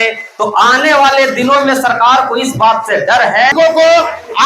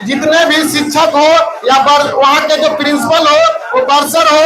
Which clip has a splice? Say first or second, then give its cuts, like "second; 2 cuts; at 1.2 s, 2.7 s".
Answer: first; 1 cut; at 3.5 s